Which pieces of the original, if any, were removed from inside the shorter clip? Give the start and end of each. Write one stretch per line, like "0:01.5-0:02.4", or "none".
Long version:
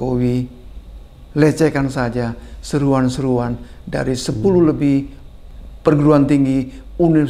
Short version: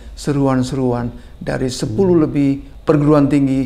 0:05.2-0:05.7